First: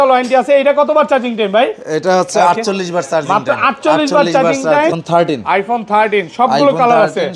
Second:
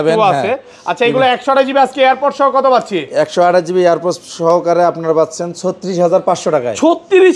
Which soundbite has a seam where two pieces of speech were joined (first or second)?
first